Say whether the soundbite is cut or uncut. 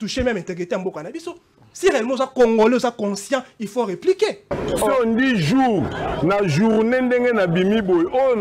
cut